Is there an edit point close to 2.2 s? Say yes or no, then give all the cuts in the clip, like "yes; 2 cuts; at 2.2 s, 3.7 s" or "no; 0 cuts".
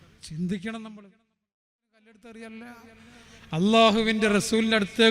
yes; 1 cut; at 2.2 s